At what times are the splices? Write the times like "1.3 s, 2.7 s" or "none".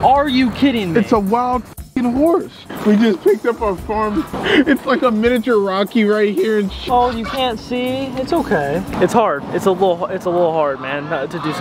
2.6 s, 6.8 s

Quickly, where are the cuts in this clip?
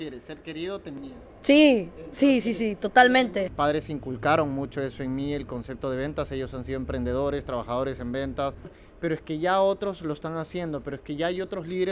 3.5 s, 8.8 s

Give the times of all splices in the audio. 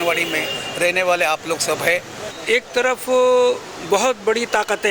2.3 s

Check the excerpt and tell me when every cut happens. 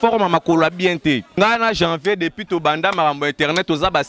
1.4 s

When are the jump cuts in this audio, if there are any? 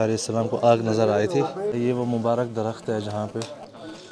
1.7 s

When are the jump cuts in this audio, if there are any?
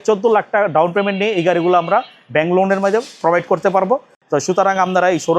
4.1 s

